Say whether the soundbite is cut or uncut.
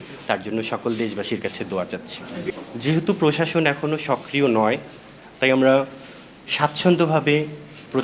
cut